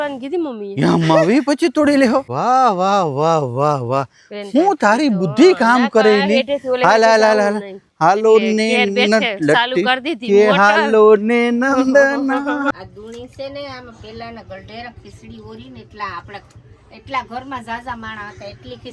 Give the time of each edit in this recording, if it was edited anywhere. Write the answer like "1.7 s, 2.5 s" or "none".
2.3 s, 12.7 s